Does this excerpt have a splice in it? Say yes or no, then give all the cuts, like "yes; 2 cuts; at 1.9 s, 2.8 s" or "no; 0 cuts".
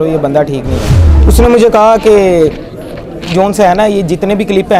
yes; 1 cut; at 1.1 s